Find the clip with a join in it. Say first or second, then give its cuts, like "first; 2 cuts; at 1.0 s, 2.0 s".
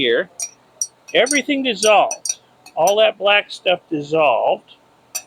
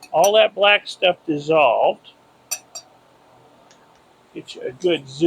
second; 1 cut; at 4.0 s